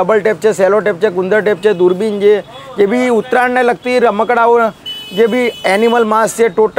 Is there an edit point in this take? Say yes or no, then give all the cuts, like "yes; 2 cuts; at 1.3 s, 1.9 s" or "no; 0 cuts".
no; 0 cuts